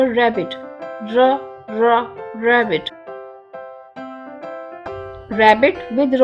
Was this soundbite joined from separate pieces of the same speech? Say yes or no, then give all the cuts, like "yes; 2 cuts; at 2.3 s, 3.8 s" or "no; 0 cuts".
no; 0 cuts